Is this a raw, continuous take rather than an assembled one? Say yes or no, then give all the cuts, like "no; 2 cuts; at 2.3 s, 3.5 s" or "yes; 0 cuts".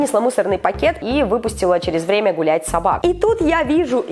no; 2 cuts; at 1.0 s, 3.0 s